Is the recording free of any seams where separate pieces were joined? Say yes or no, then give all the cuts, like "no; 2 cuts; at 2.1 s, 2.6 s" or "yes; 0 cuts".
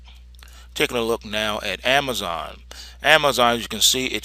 no; 1 cut; at 2.0 s